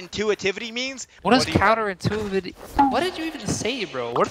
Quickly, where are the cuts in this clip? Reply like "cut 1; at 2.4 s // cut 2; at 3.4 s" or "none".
cut 1; at 1.1 s